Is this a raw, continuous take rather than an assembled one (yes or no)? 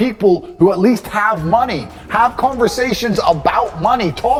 yes